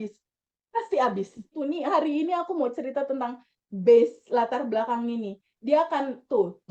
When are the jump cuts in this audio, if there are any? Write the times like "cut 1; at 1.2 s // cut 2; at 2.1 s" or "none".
cut 1; at 1.5 s